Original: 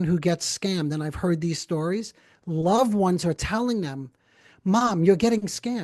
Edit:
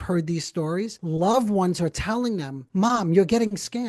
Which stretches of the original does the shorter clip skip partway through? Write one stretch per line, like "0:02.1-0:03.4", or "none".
0:02.1-0:02.4
0:04.0-0:04.5

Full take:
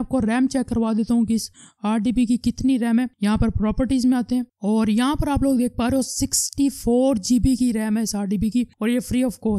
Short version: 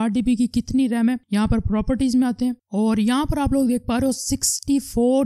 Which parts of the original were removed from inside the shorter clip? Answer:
none

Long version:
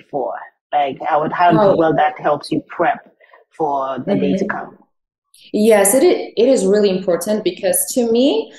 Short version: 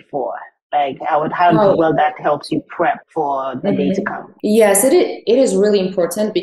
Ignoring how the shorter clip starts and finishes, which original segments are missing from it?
0:03.1-0:03.5
0:04.7-0:05.3

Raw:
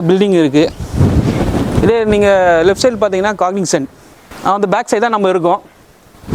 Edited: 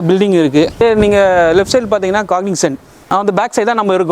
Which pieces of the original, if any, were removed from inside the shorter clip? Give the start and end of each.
0:00.8-0:01.9
0:04.0-0:04.2

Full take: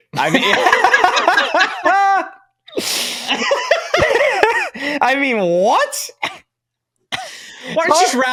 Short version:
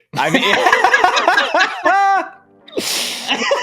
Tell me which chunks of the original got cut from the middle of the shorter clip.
none

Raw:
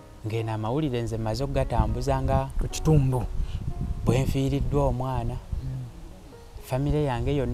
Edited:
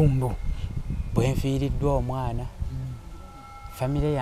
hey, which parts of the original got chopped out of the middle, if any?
none

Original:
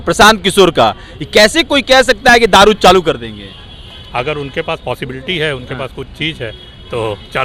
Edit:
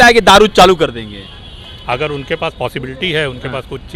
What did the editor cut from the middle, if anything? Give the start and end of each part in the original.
none

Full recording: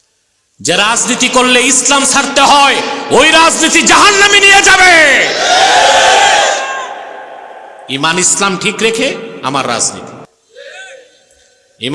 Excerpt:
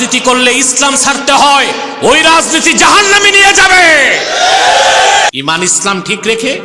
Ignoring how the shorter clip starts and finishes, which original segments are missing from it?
0:06.4-0:07.8

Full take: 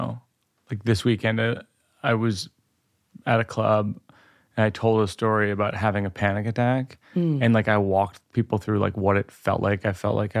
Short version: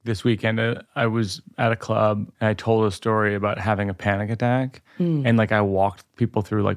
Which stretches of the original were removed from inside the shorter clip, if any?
0:01.7-0:01.9
0:02.5-0:03.1
0:04.0-0:04.5

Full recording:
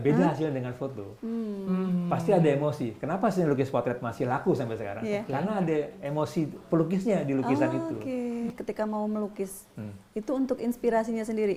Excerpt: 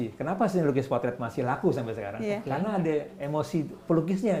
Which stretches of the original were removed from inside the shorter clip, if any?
none

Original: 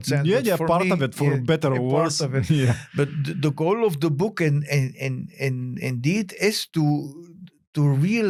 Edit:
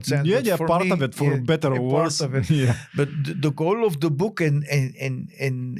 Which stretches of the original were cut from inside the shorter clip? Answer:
none

